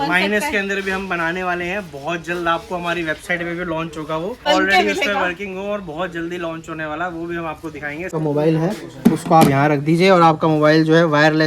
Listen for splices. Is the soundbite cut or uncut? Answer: cut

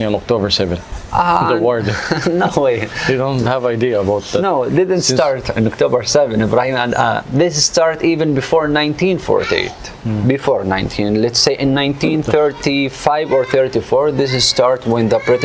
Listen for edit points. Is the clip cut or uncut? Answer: uncut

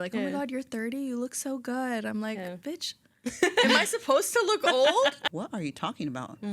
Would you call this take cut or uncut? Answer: cut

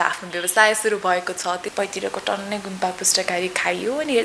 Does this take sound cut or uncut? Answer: cut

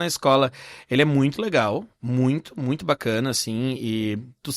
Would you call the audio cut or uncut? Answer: uncut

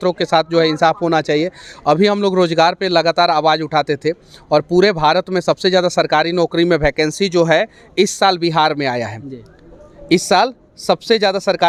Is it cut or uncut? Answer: uncut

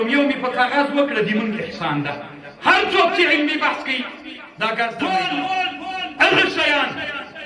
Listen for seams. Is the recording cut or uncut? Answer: cut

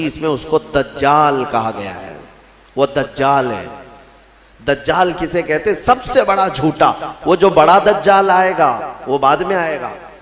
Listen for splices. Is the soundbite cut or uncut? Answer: uncut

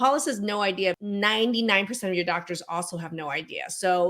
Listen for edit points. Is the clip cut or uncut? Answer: cut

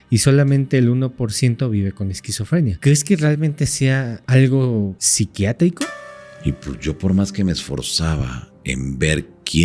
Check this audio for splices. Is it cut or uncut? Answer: cut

